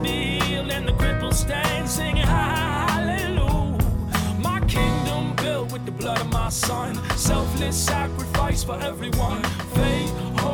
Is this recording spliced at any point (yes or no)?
no